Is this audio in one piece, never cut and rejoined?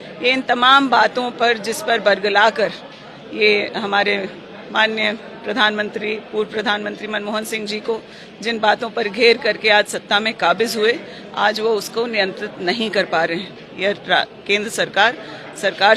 yes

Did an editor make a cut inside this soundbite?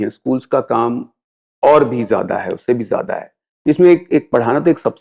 no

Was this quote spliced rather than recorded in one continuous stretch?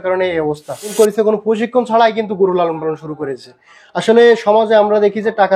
yes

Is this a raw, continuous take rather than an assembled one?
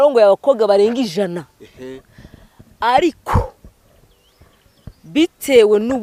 yes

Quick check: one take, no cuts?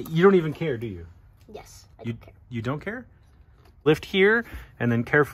no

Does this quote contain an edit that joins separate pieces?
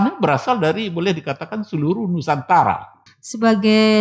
yes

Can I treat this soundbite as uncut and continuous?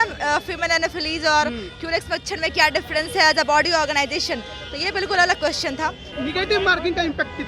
no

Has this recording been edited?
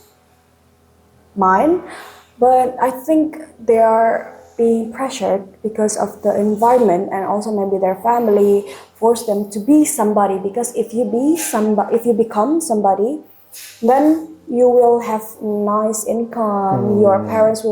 no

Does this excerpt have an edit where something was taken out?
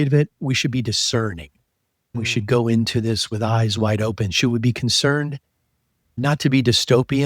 no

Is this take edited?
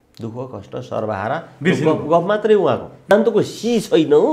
yes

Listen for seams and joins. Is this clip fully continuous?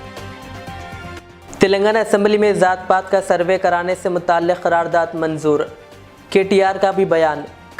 no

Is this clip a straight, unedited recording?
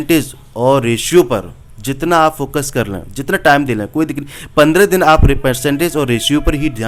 yes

